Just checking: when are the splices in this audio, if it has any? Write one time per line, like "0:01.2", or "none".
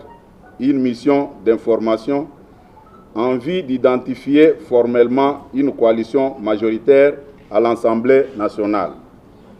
none